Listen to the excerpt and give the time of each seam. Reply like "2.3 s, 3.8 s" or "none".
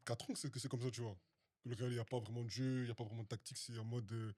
none